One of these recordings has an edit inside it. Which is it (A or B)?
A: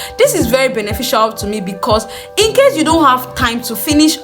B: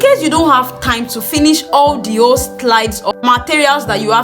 B